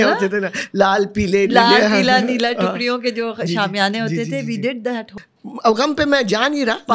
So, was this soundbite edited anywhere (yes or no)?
yes